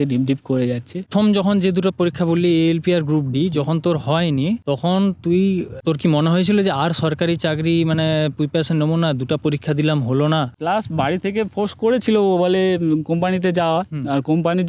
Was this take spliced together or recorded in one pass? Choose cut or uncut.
cut